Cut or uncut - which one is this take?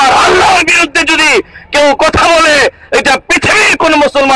uncut